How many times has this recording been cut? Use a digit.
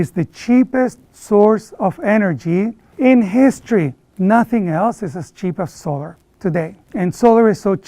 1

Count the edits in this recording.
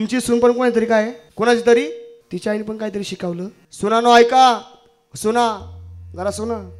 3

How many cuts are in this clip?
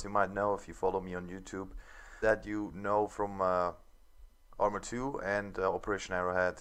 0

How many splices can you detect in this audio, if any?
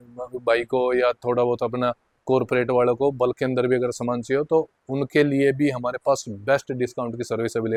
0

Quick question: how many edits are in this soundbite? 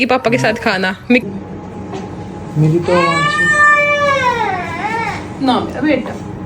1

